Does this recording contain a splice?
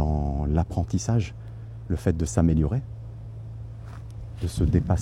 no; 0 cuts

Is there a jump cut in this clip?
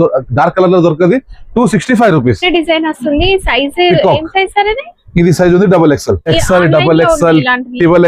yes; 2 cuts; at 2.4 s, 6.3 s

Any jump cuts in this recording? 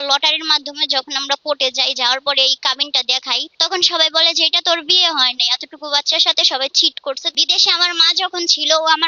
yes; 2 cuts; at 3.5 s, 7.3 s

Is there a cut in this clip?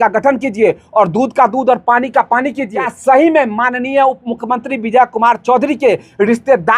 yes; 1 cut; at 2.8 s

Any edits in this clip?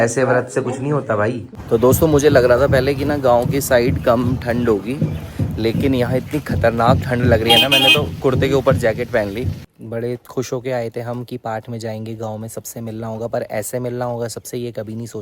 yes; 2 cuts; at 1.5 s, 9.7 s

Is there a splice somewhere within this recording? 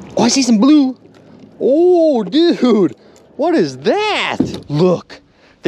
yes; 1 cut; at 4.6 s

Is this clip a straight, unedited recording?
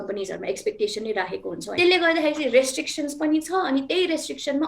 no; 1 cut; at 1.8 s

